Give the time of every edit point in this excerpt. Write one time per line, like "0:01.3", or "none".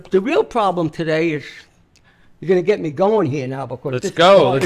none